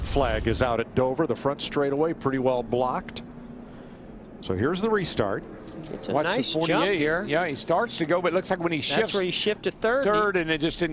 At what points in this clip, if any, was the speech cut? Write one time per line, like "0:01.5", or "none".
0:01.6